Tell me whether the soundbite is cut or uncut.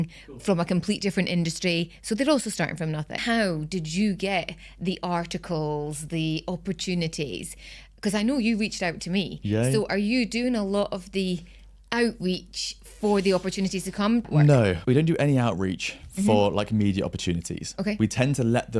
cut